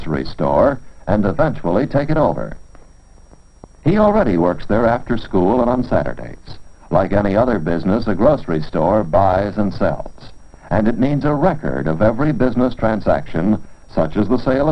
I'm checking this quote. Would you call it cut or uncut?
uncut